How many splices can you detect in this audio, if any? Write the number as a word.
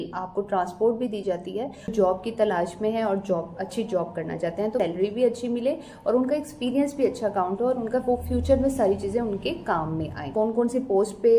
three